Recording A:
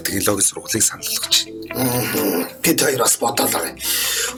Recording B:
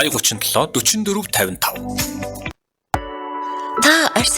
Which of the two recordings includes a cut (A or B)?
B